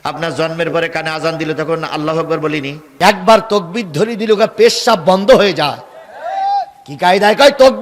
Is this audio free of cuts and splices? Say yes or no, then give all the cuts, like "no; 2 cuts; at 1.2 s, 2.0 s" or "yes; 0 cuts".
no; 1 cut; at 2.8 s